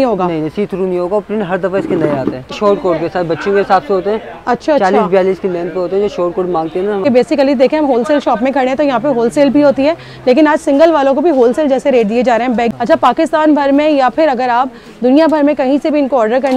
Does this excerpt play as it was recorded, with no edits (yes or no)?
no